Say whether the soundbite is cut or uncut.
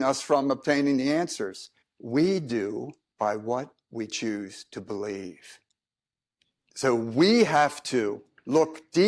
uncut